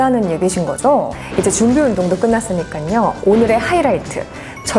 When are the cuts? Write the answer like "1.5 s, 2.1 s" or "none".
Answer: 1.2 s